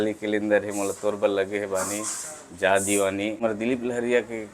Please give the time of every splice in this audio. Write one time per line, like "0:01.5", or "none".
0:03.4